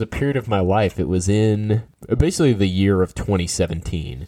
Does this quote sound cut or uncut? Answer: cut